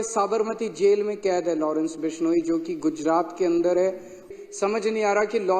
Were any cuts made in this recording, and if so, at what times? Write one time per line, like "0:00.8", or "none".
0:04.3